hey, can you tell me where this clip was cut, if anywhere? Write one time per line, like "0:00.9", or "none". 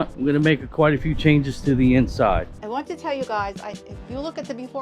0:02.6